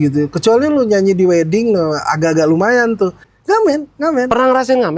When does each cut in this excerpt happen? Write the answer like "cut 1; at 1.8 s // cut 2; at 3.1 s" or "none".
cut 1; at 3.3 s